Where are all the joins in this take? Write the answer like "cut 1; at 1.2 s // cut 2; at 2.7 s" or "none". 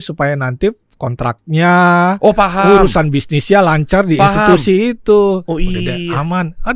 none